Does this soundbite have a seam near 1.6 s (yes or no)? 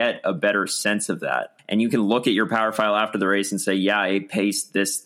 yes